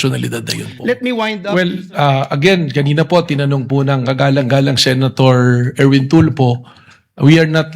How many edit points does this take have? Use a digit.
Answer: 1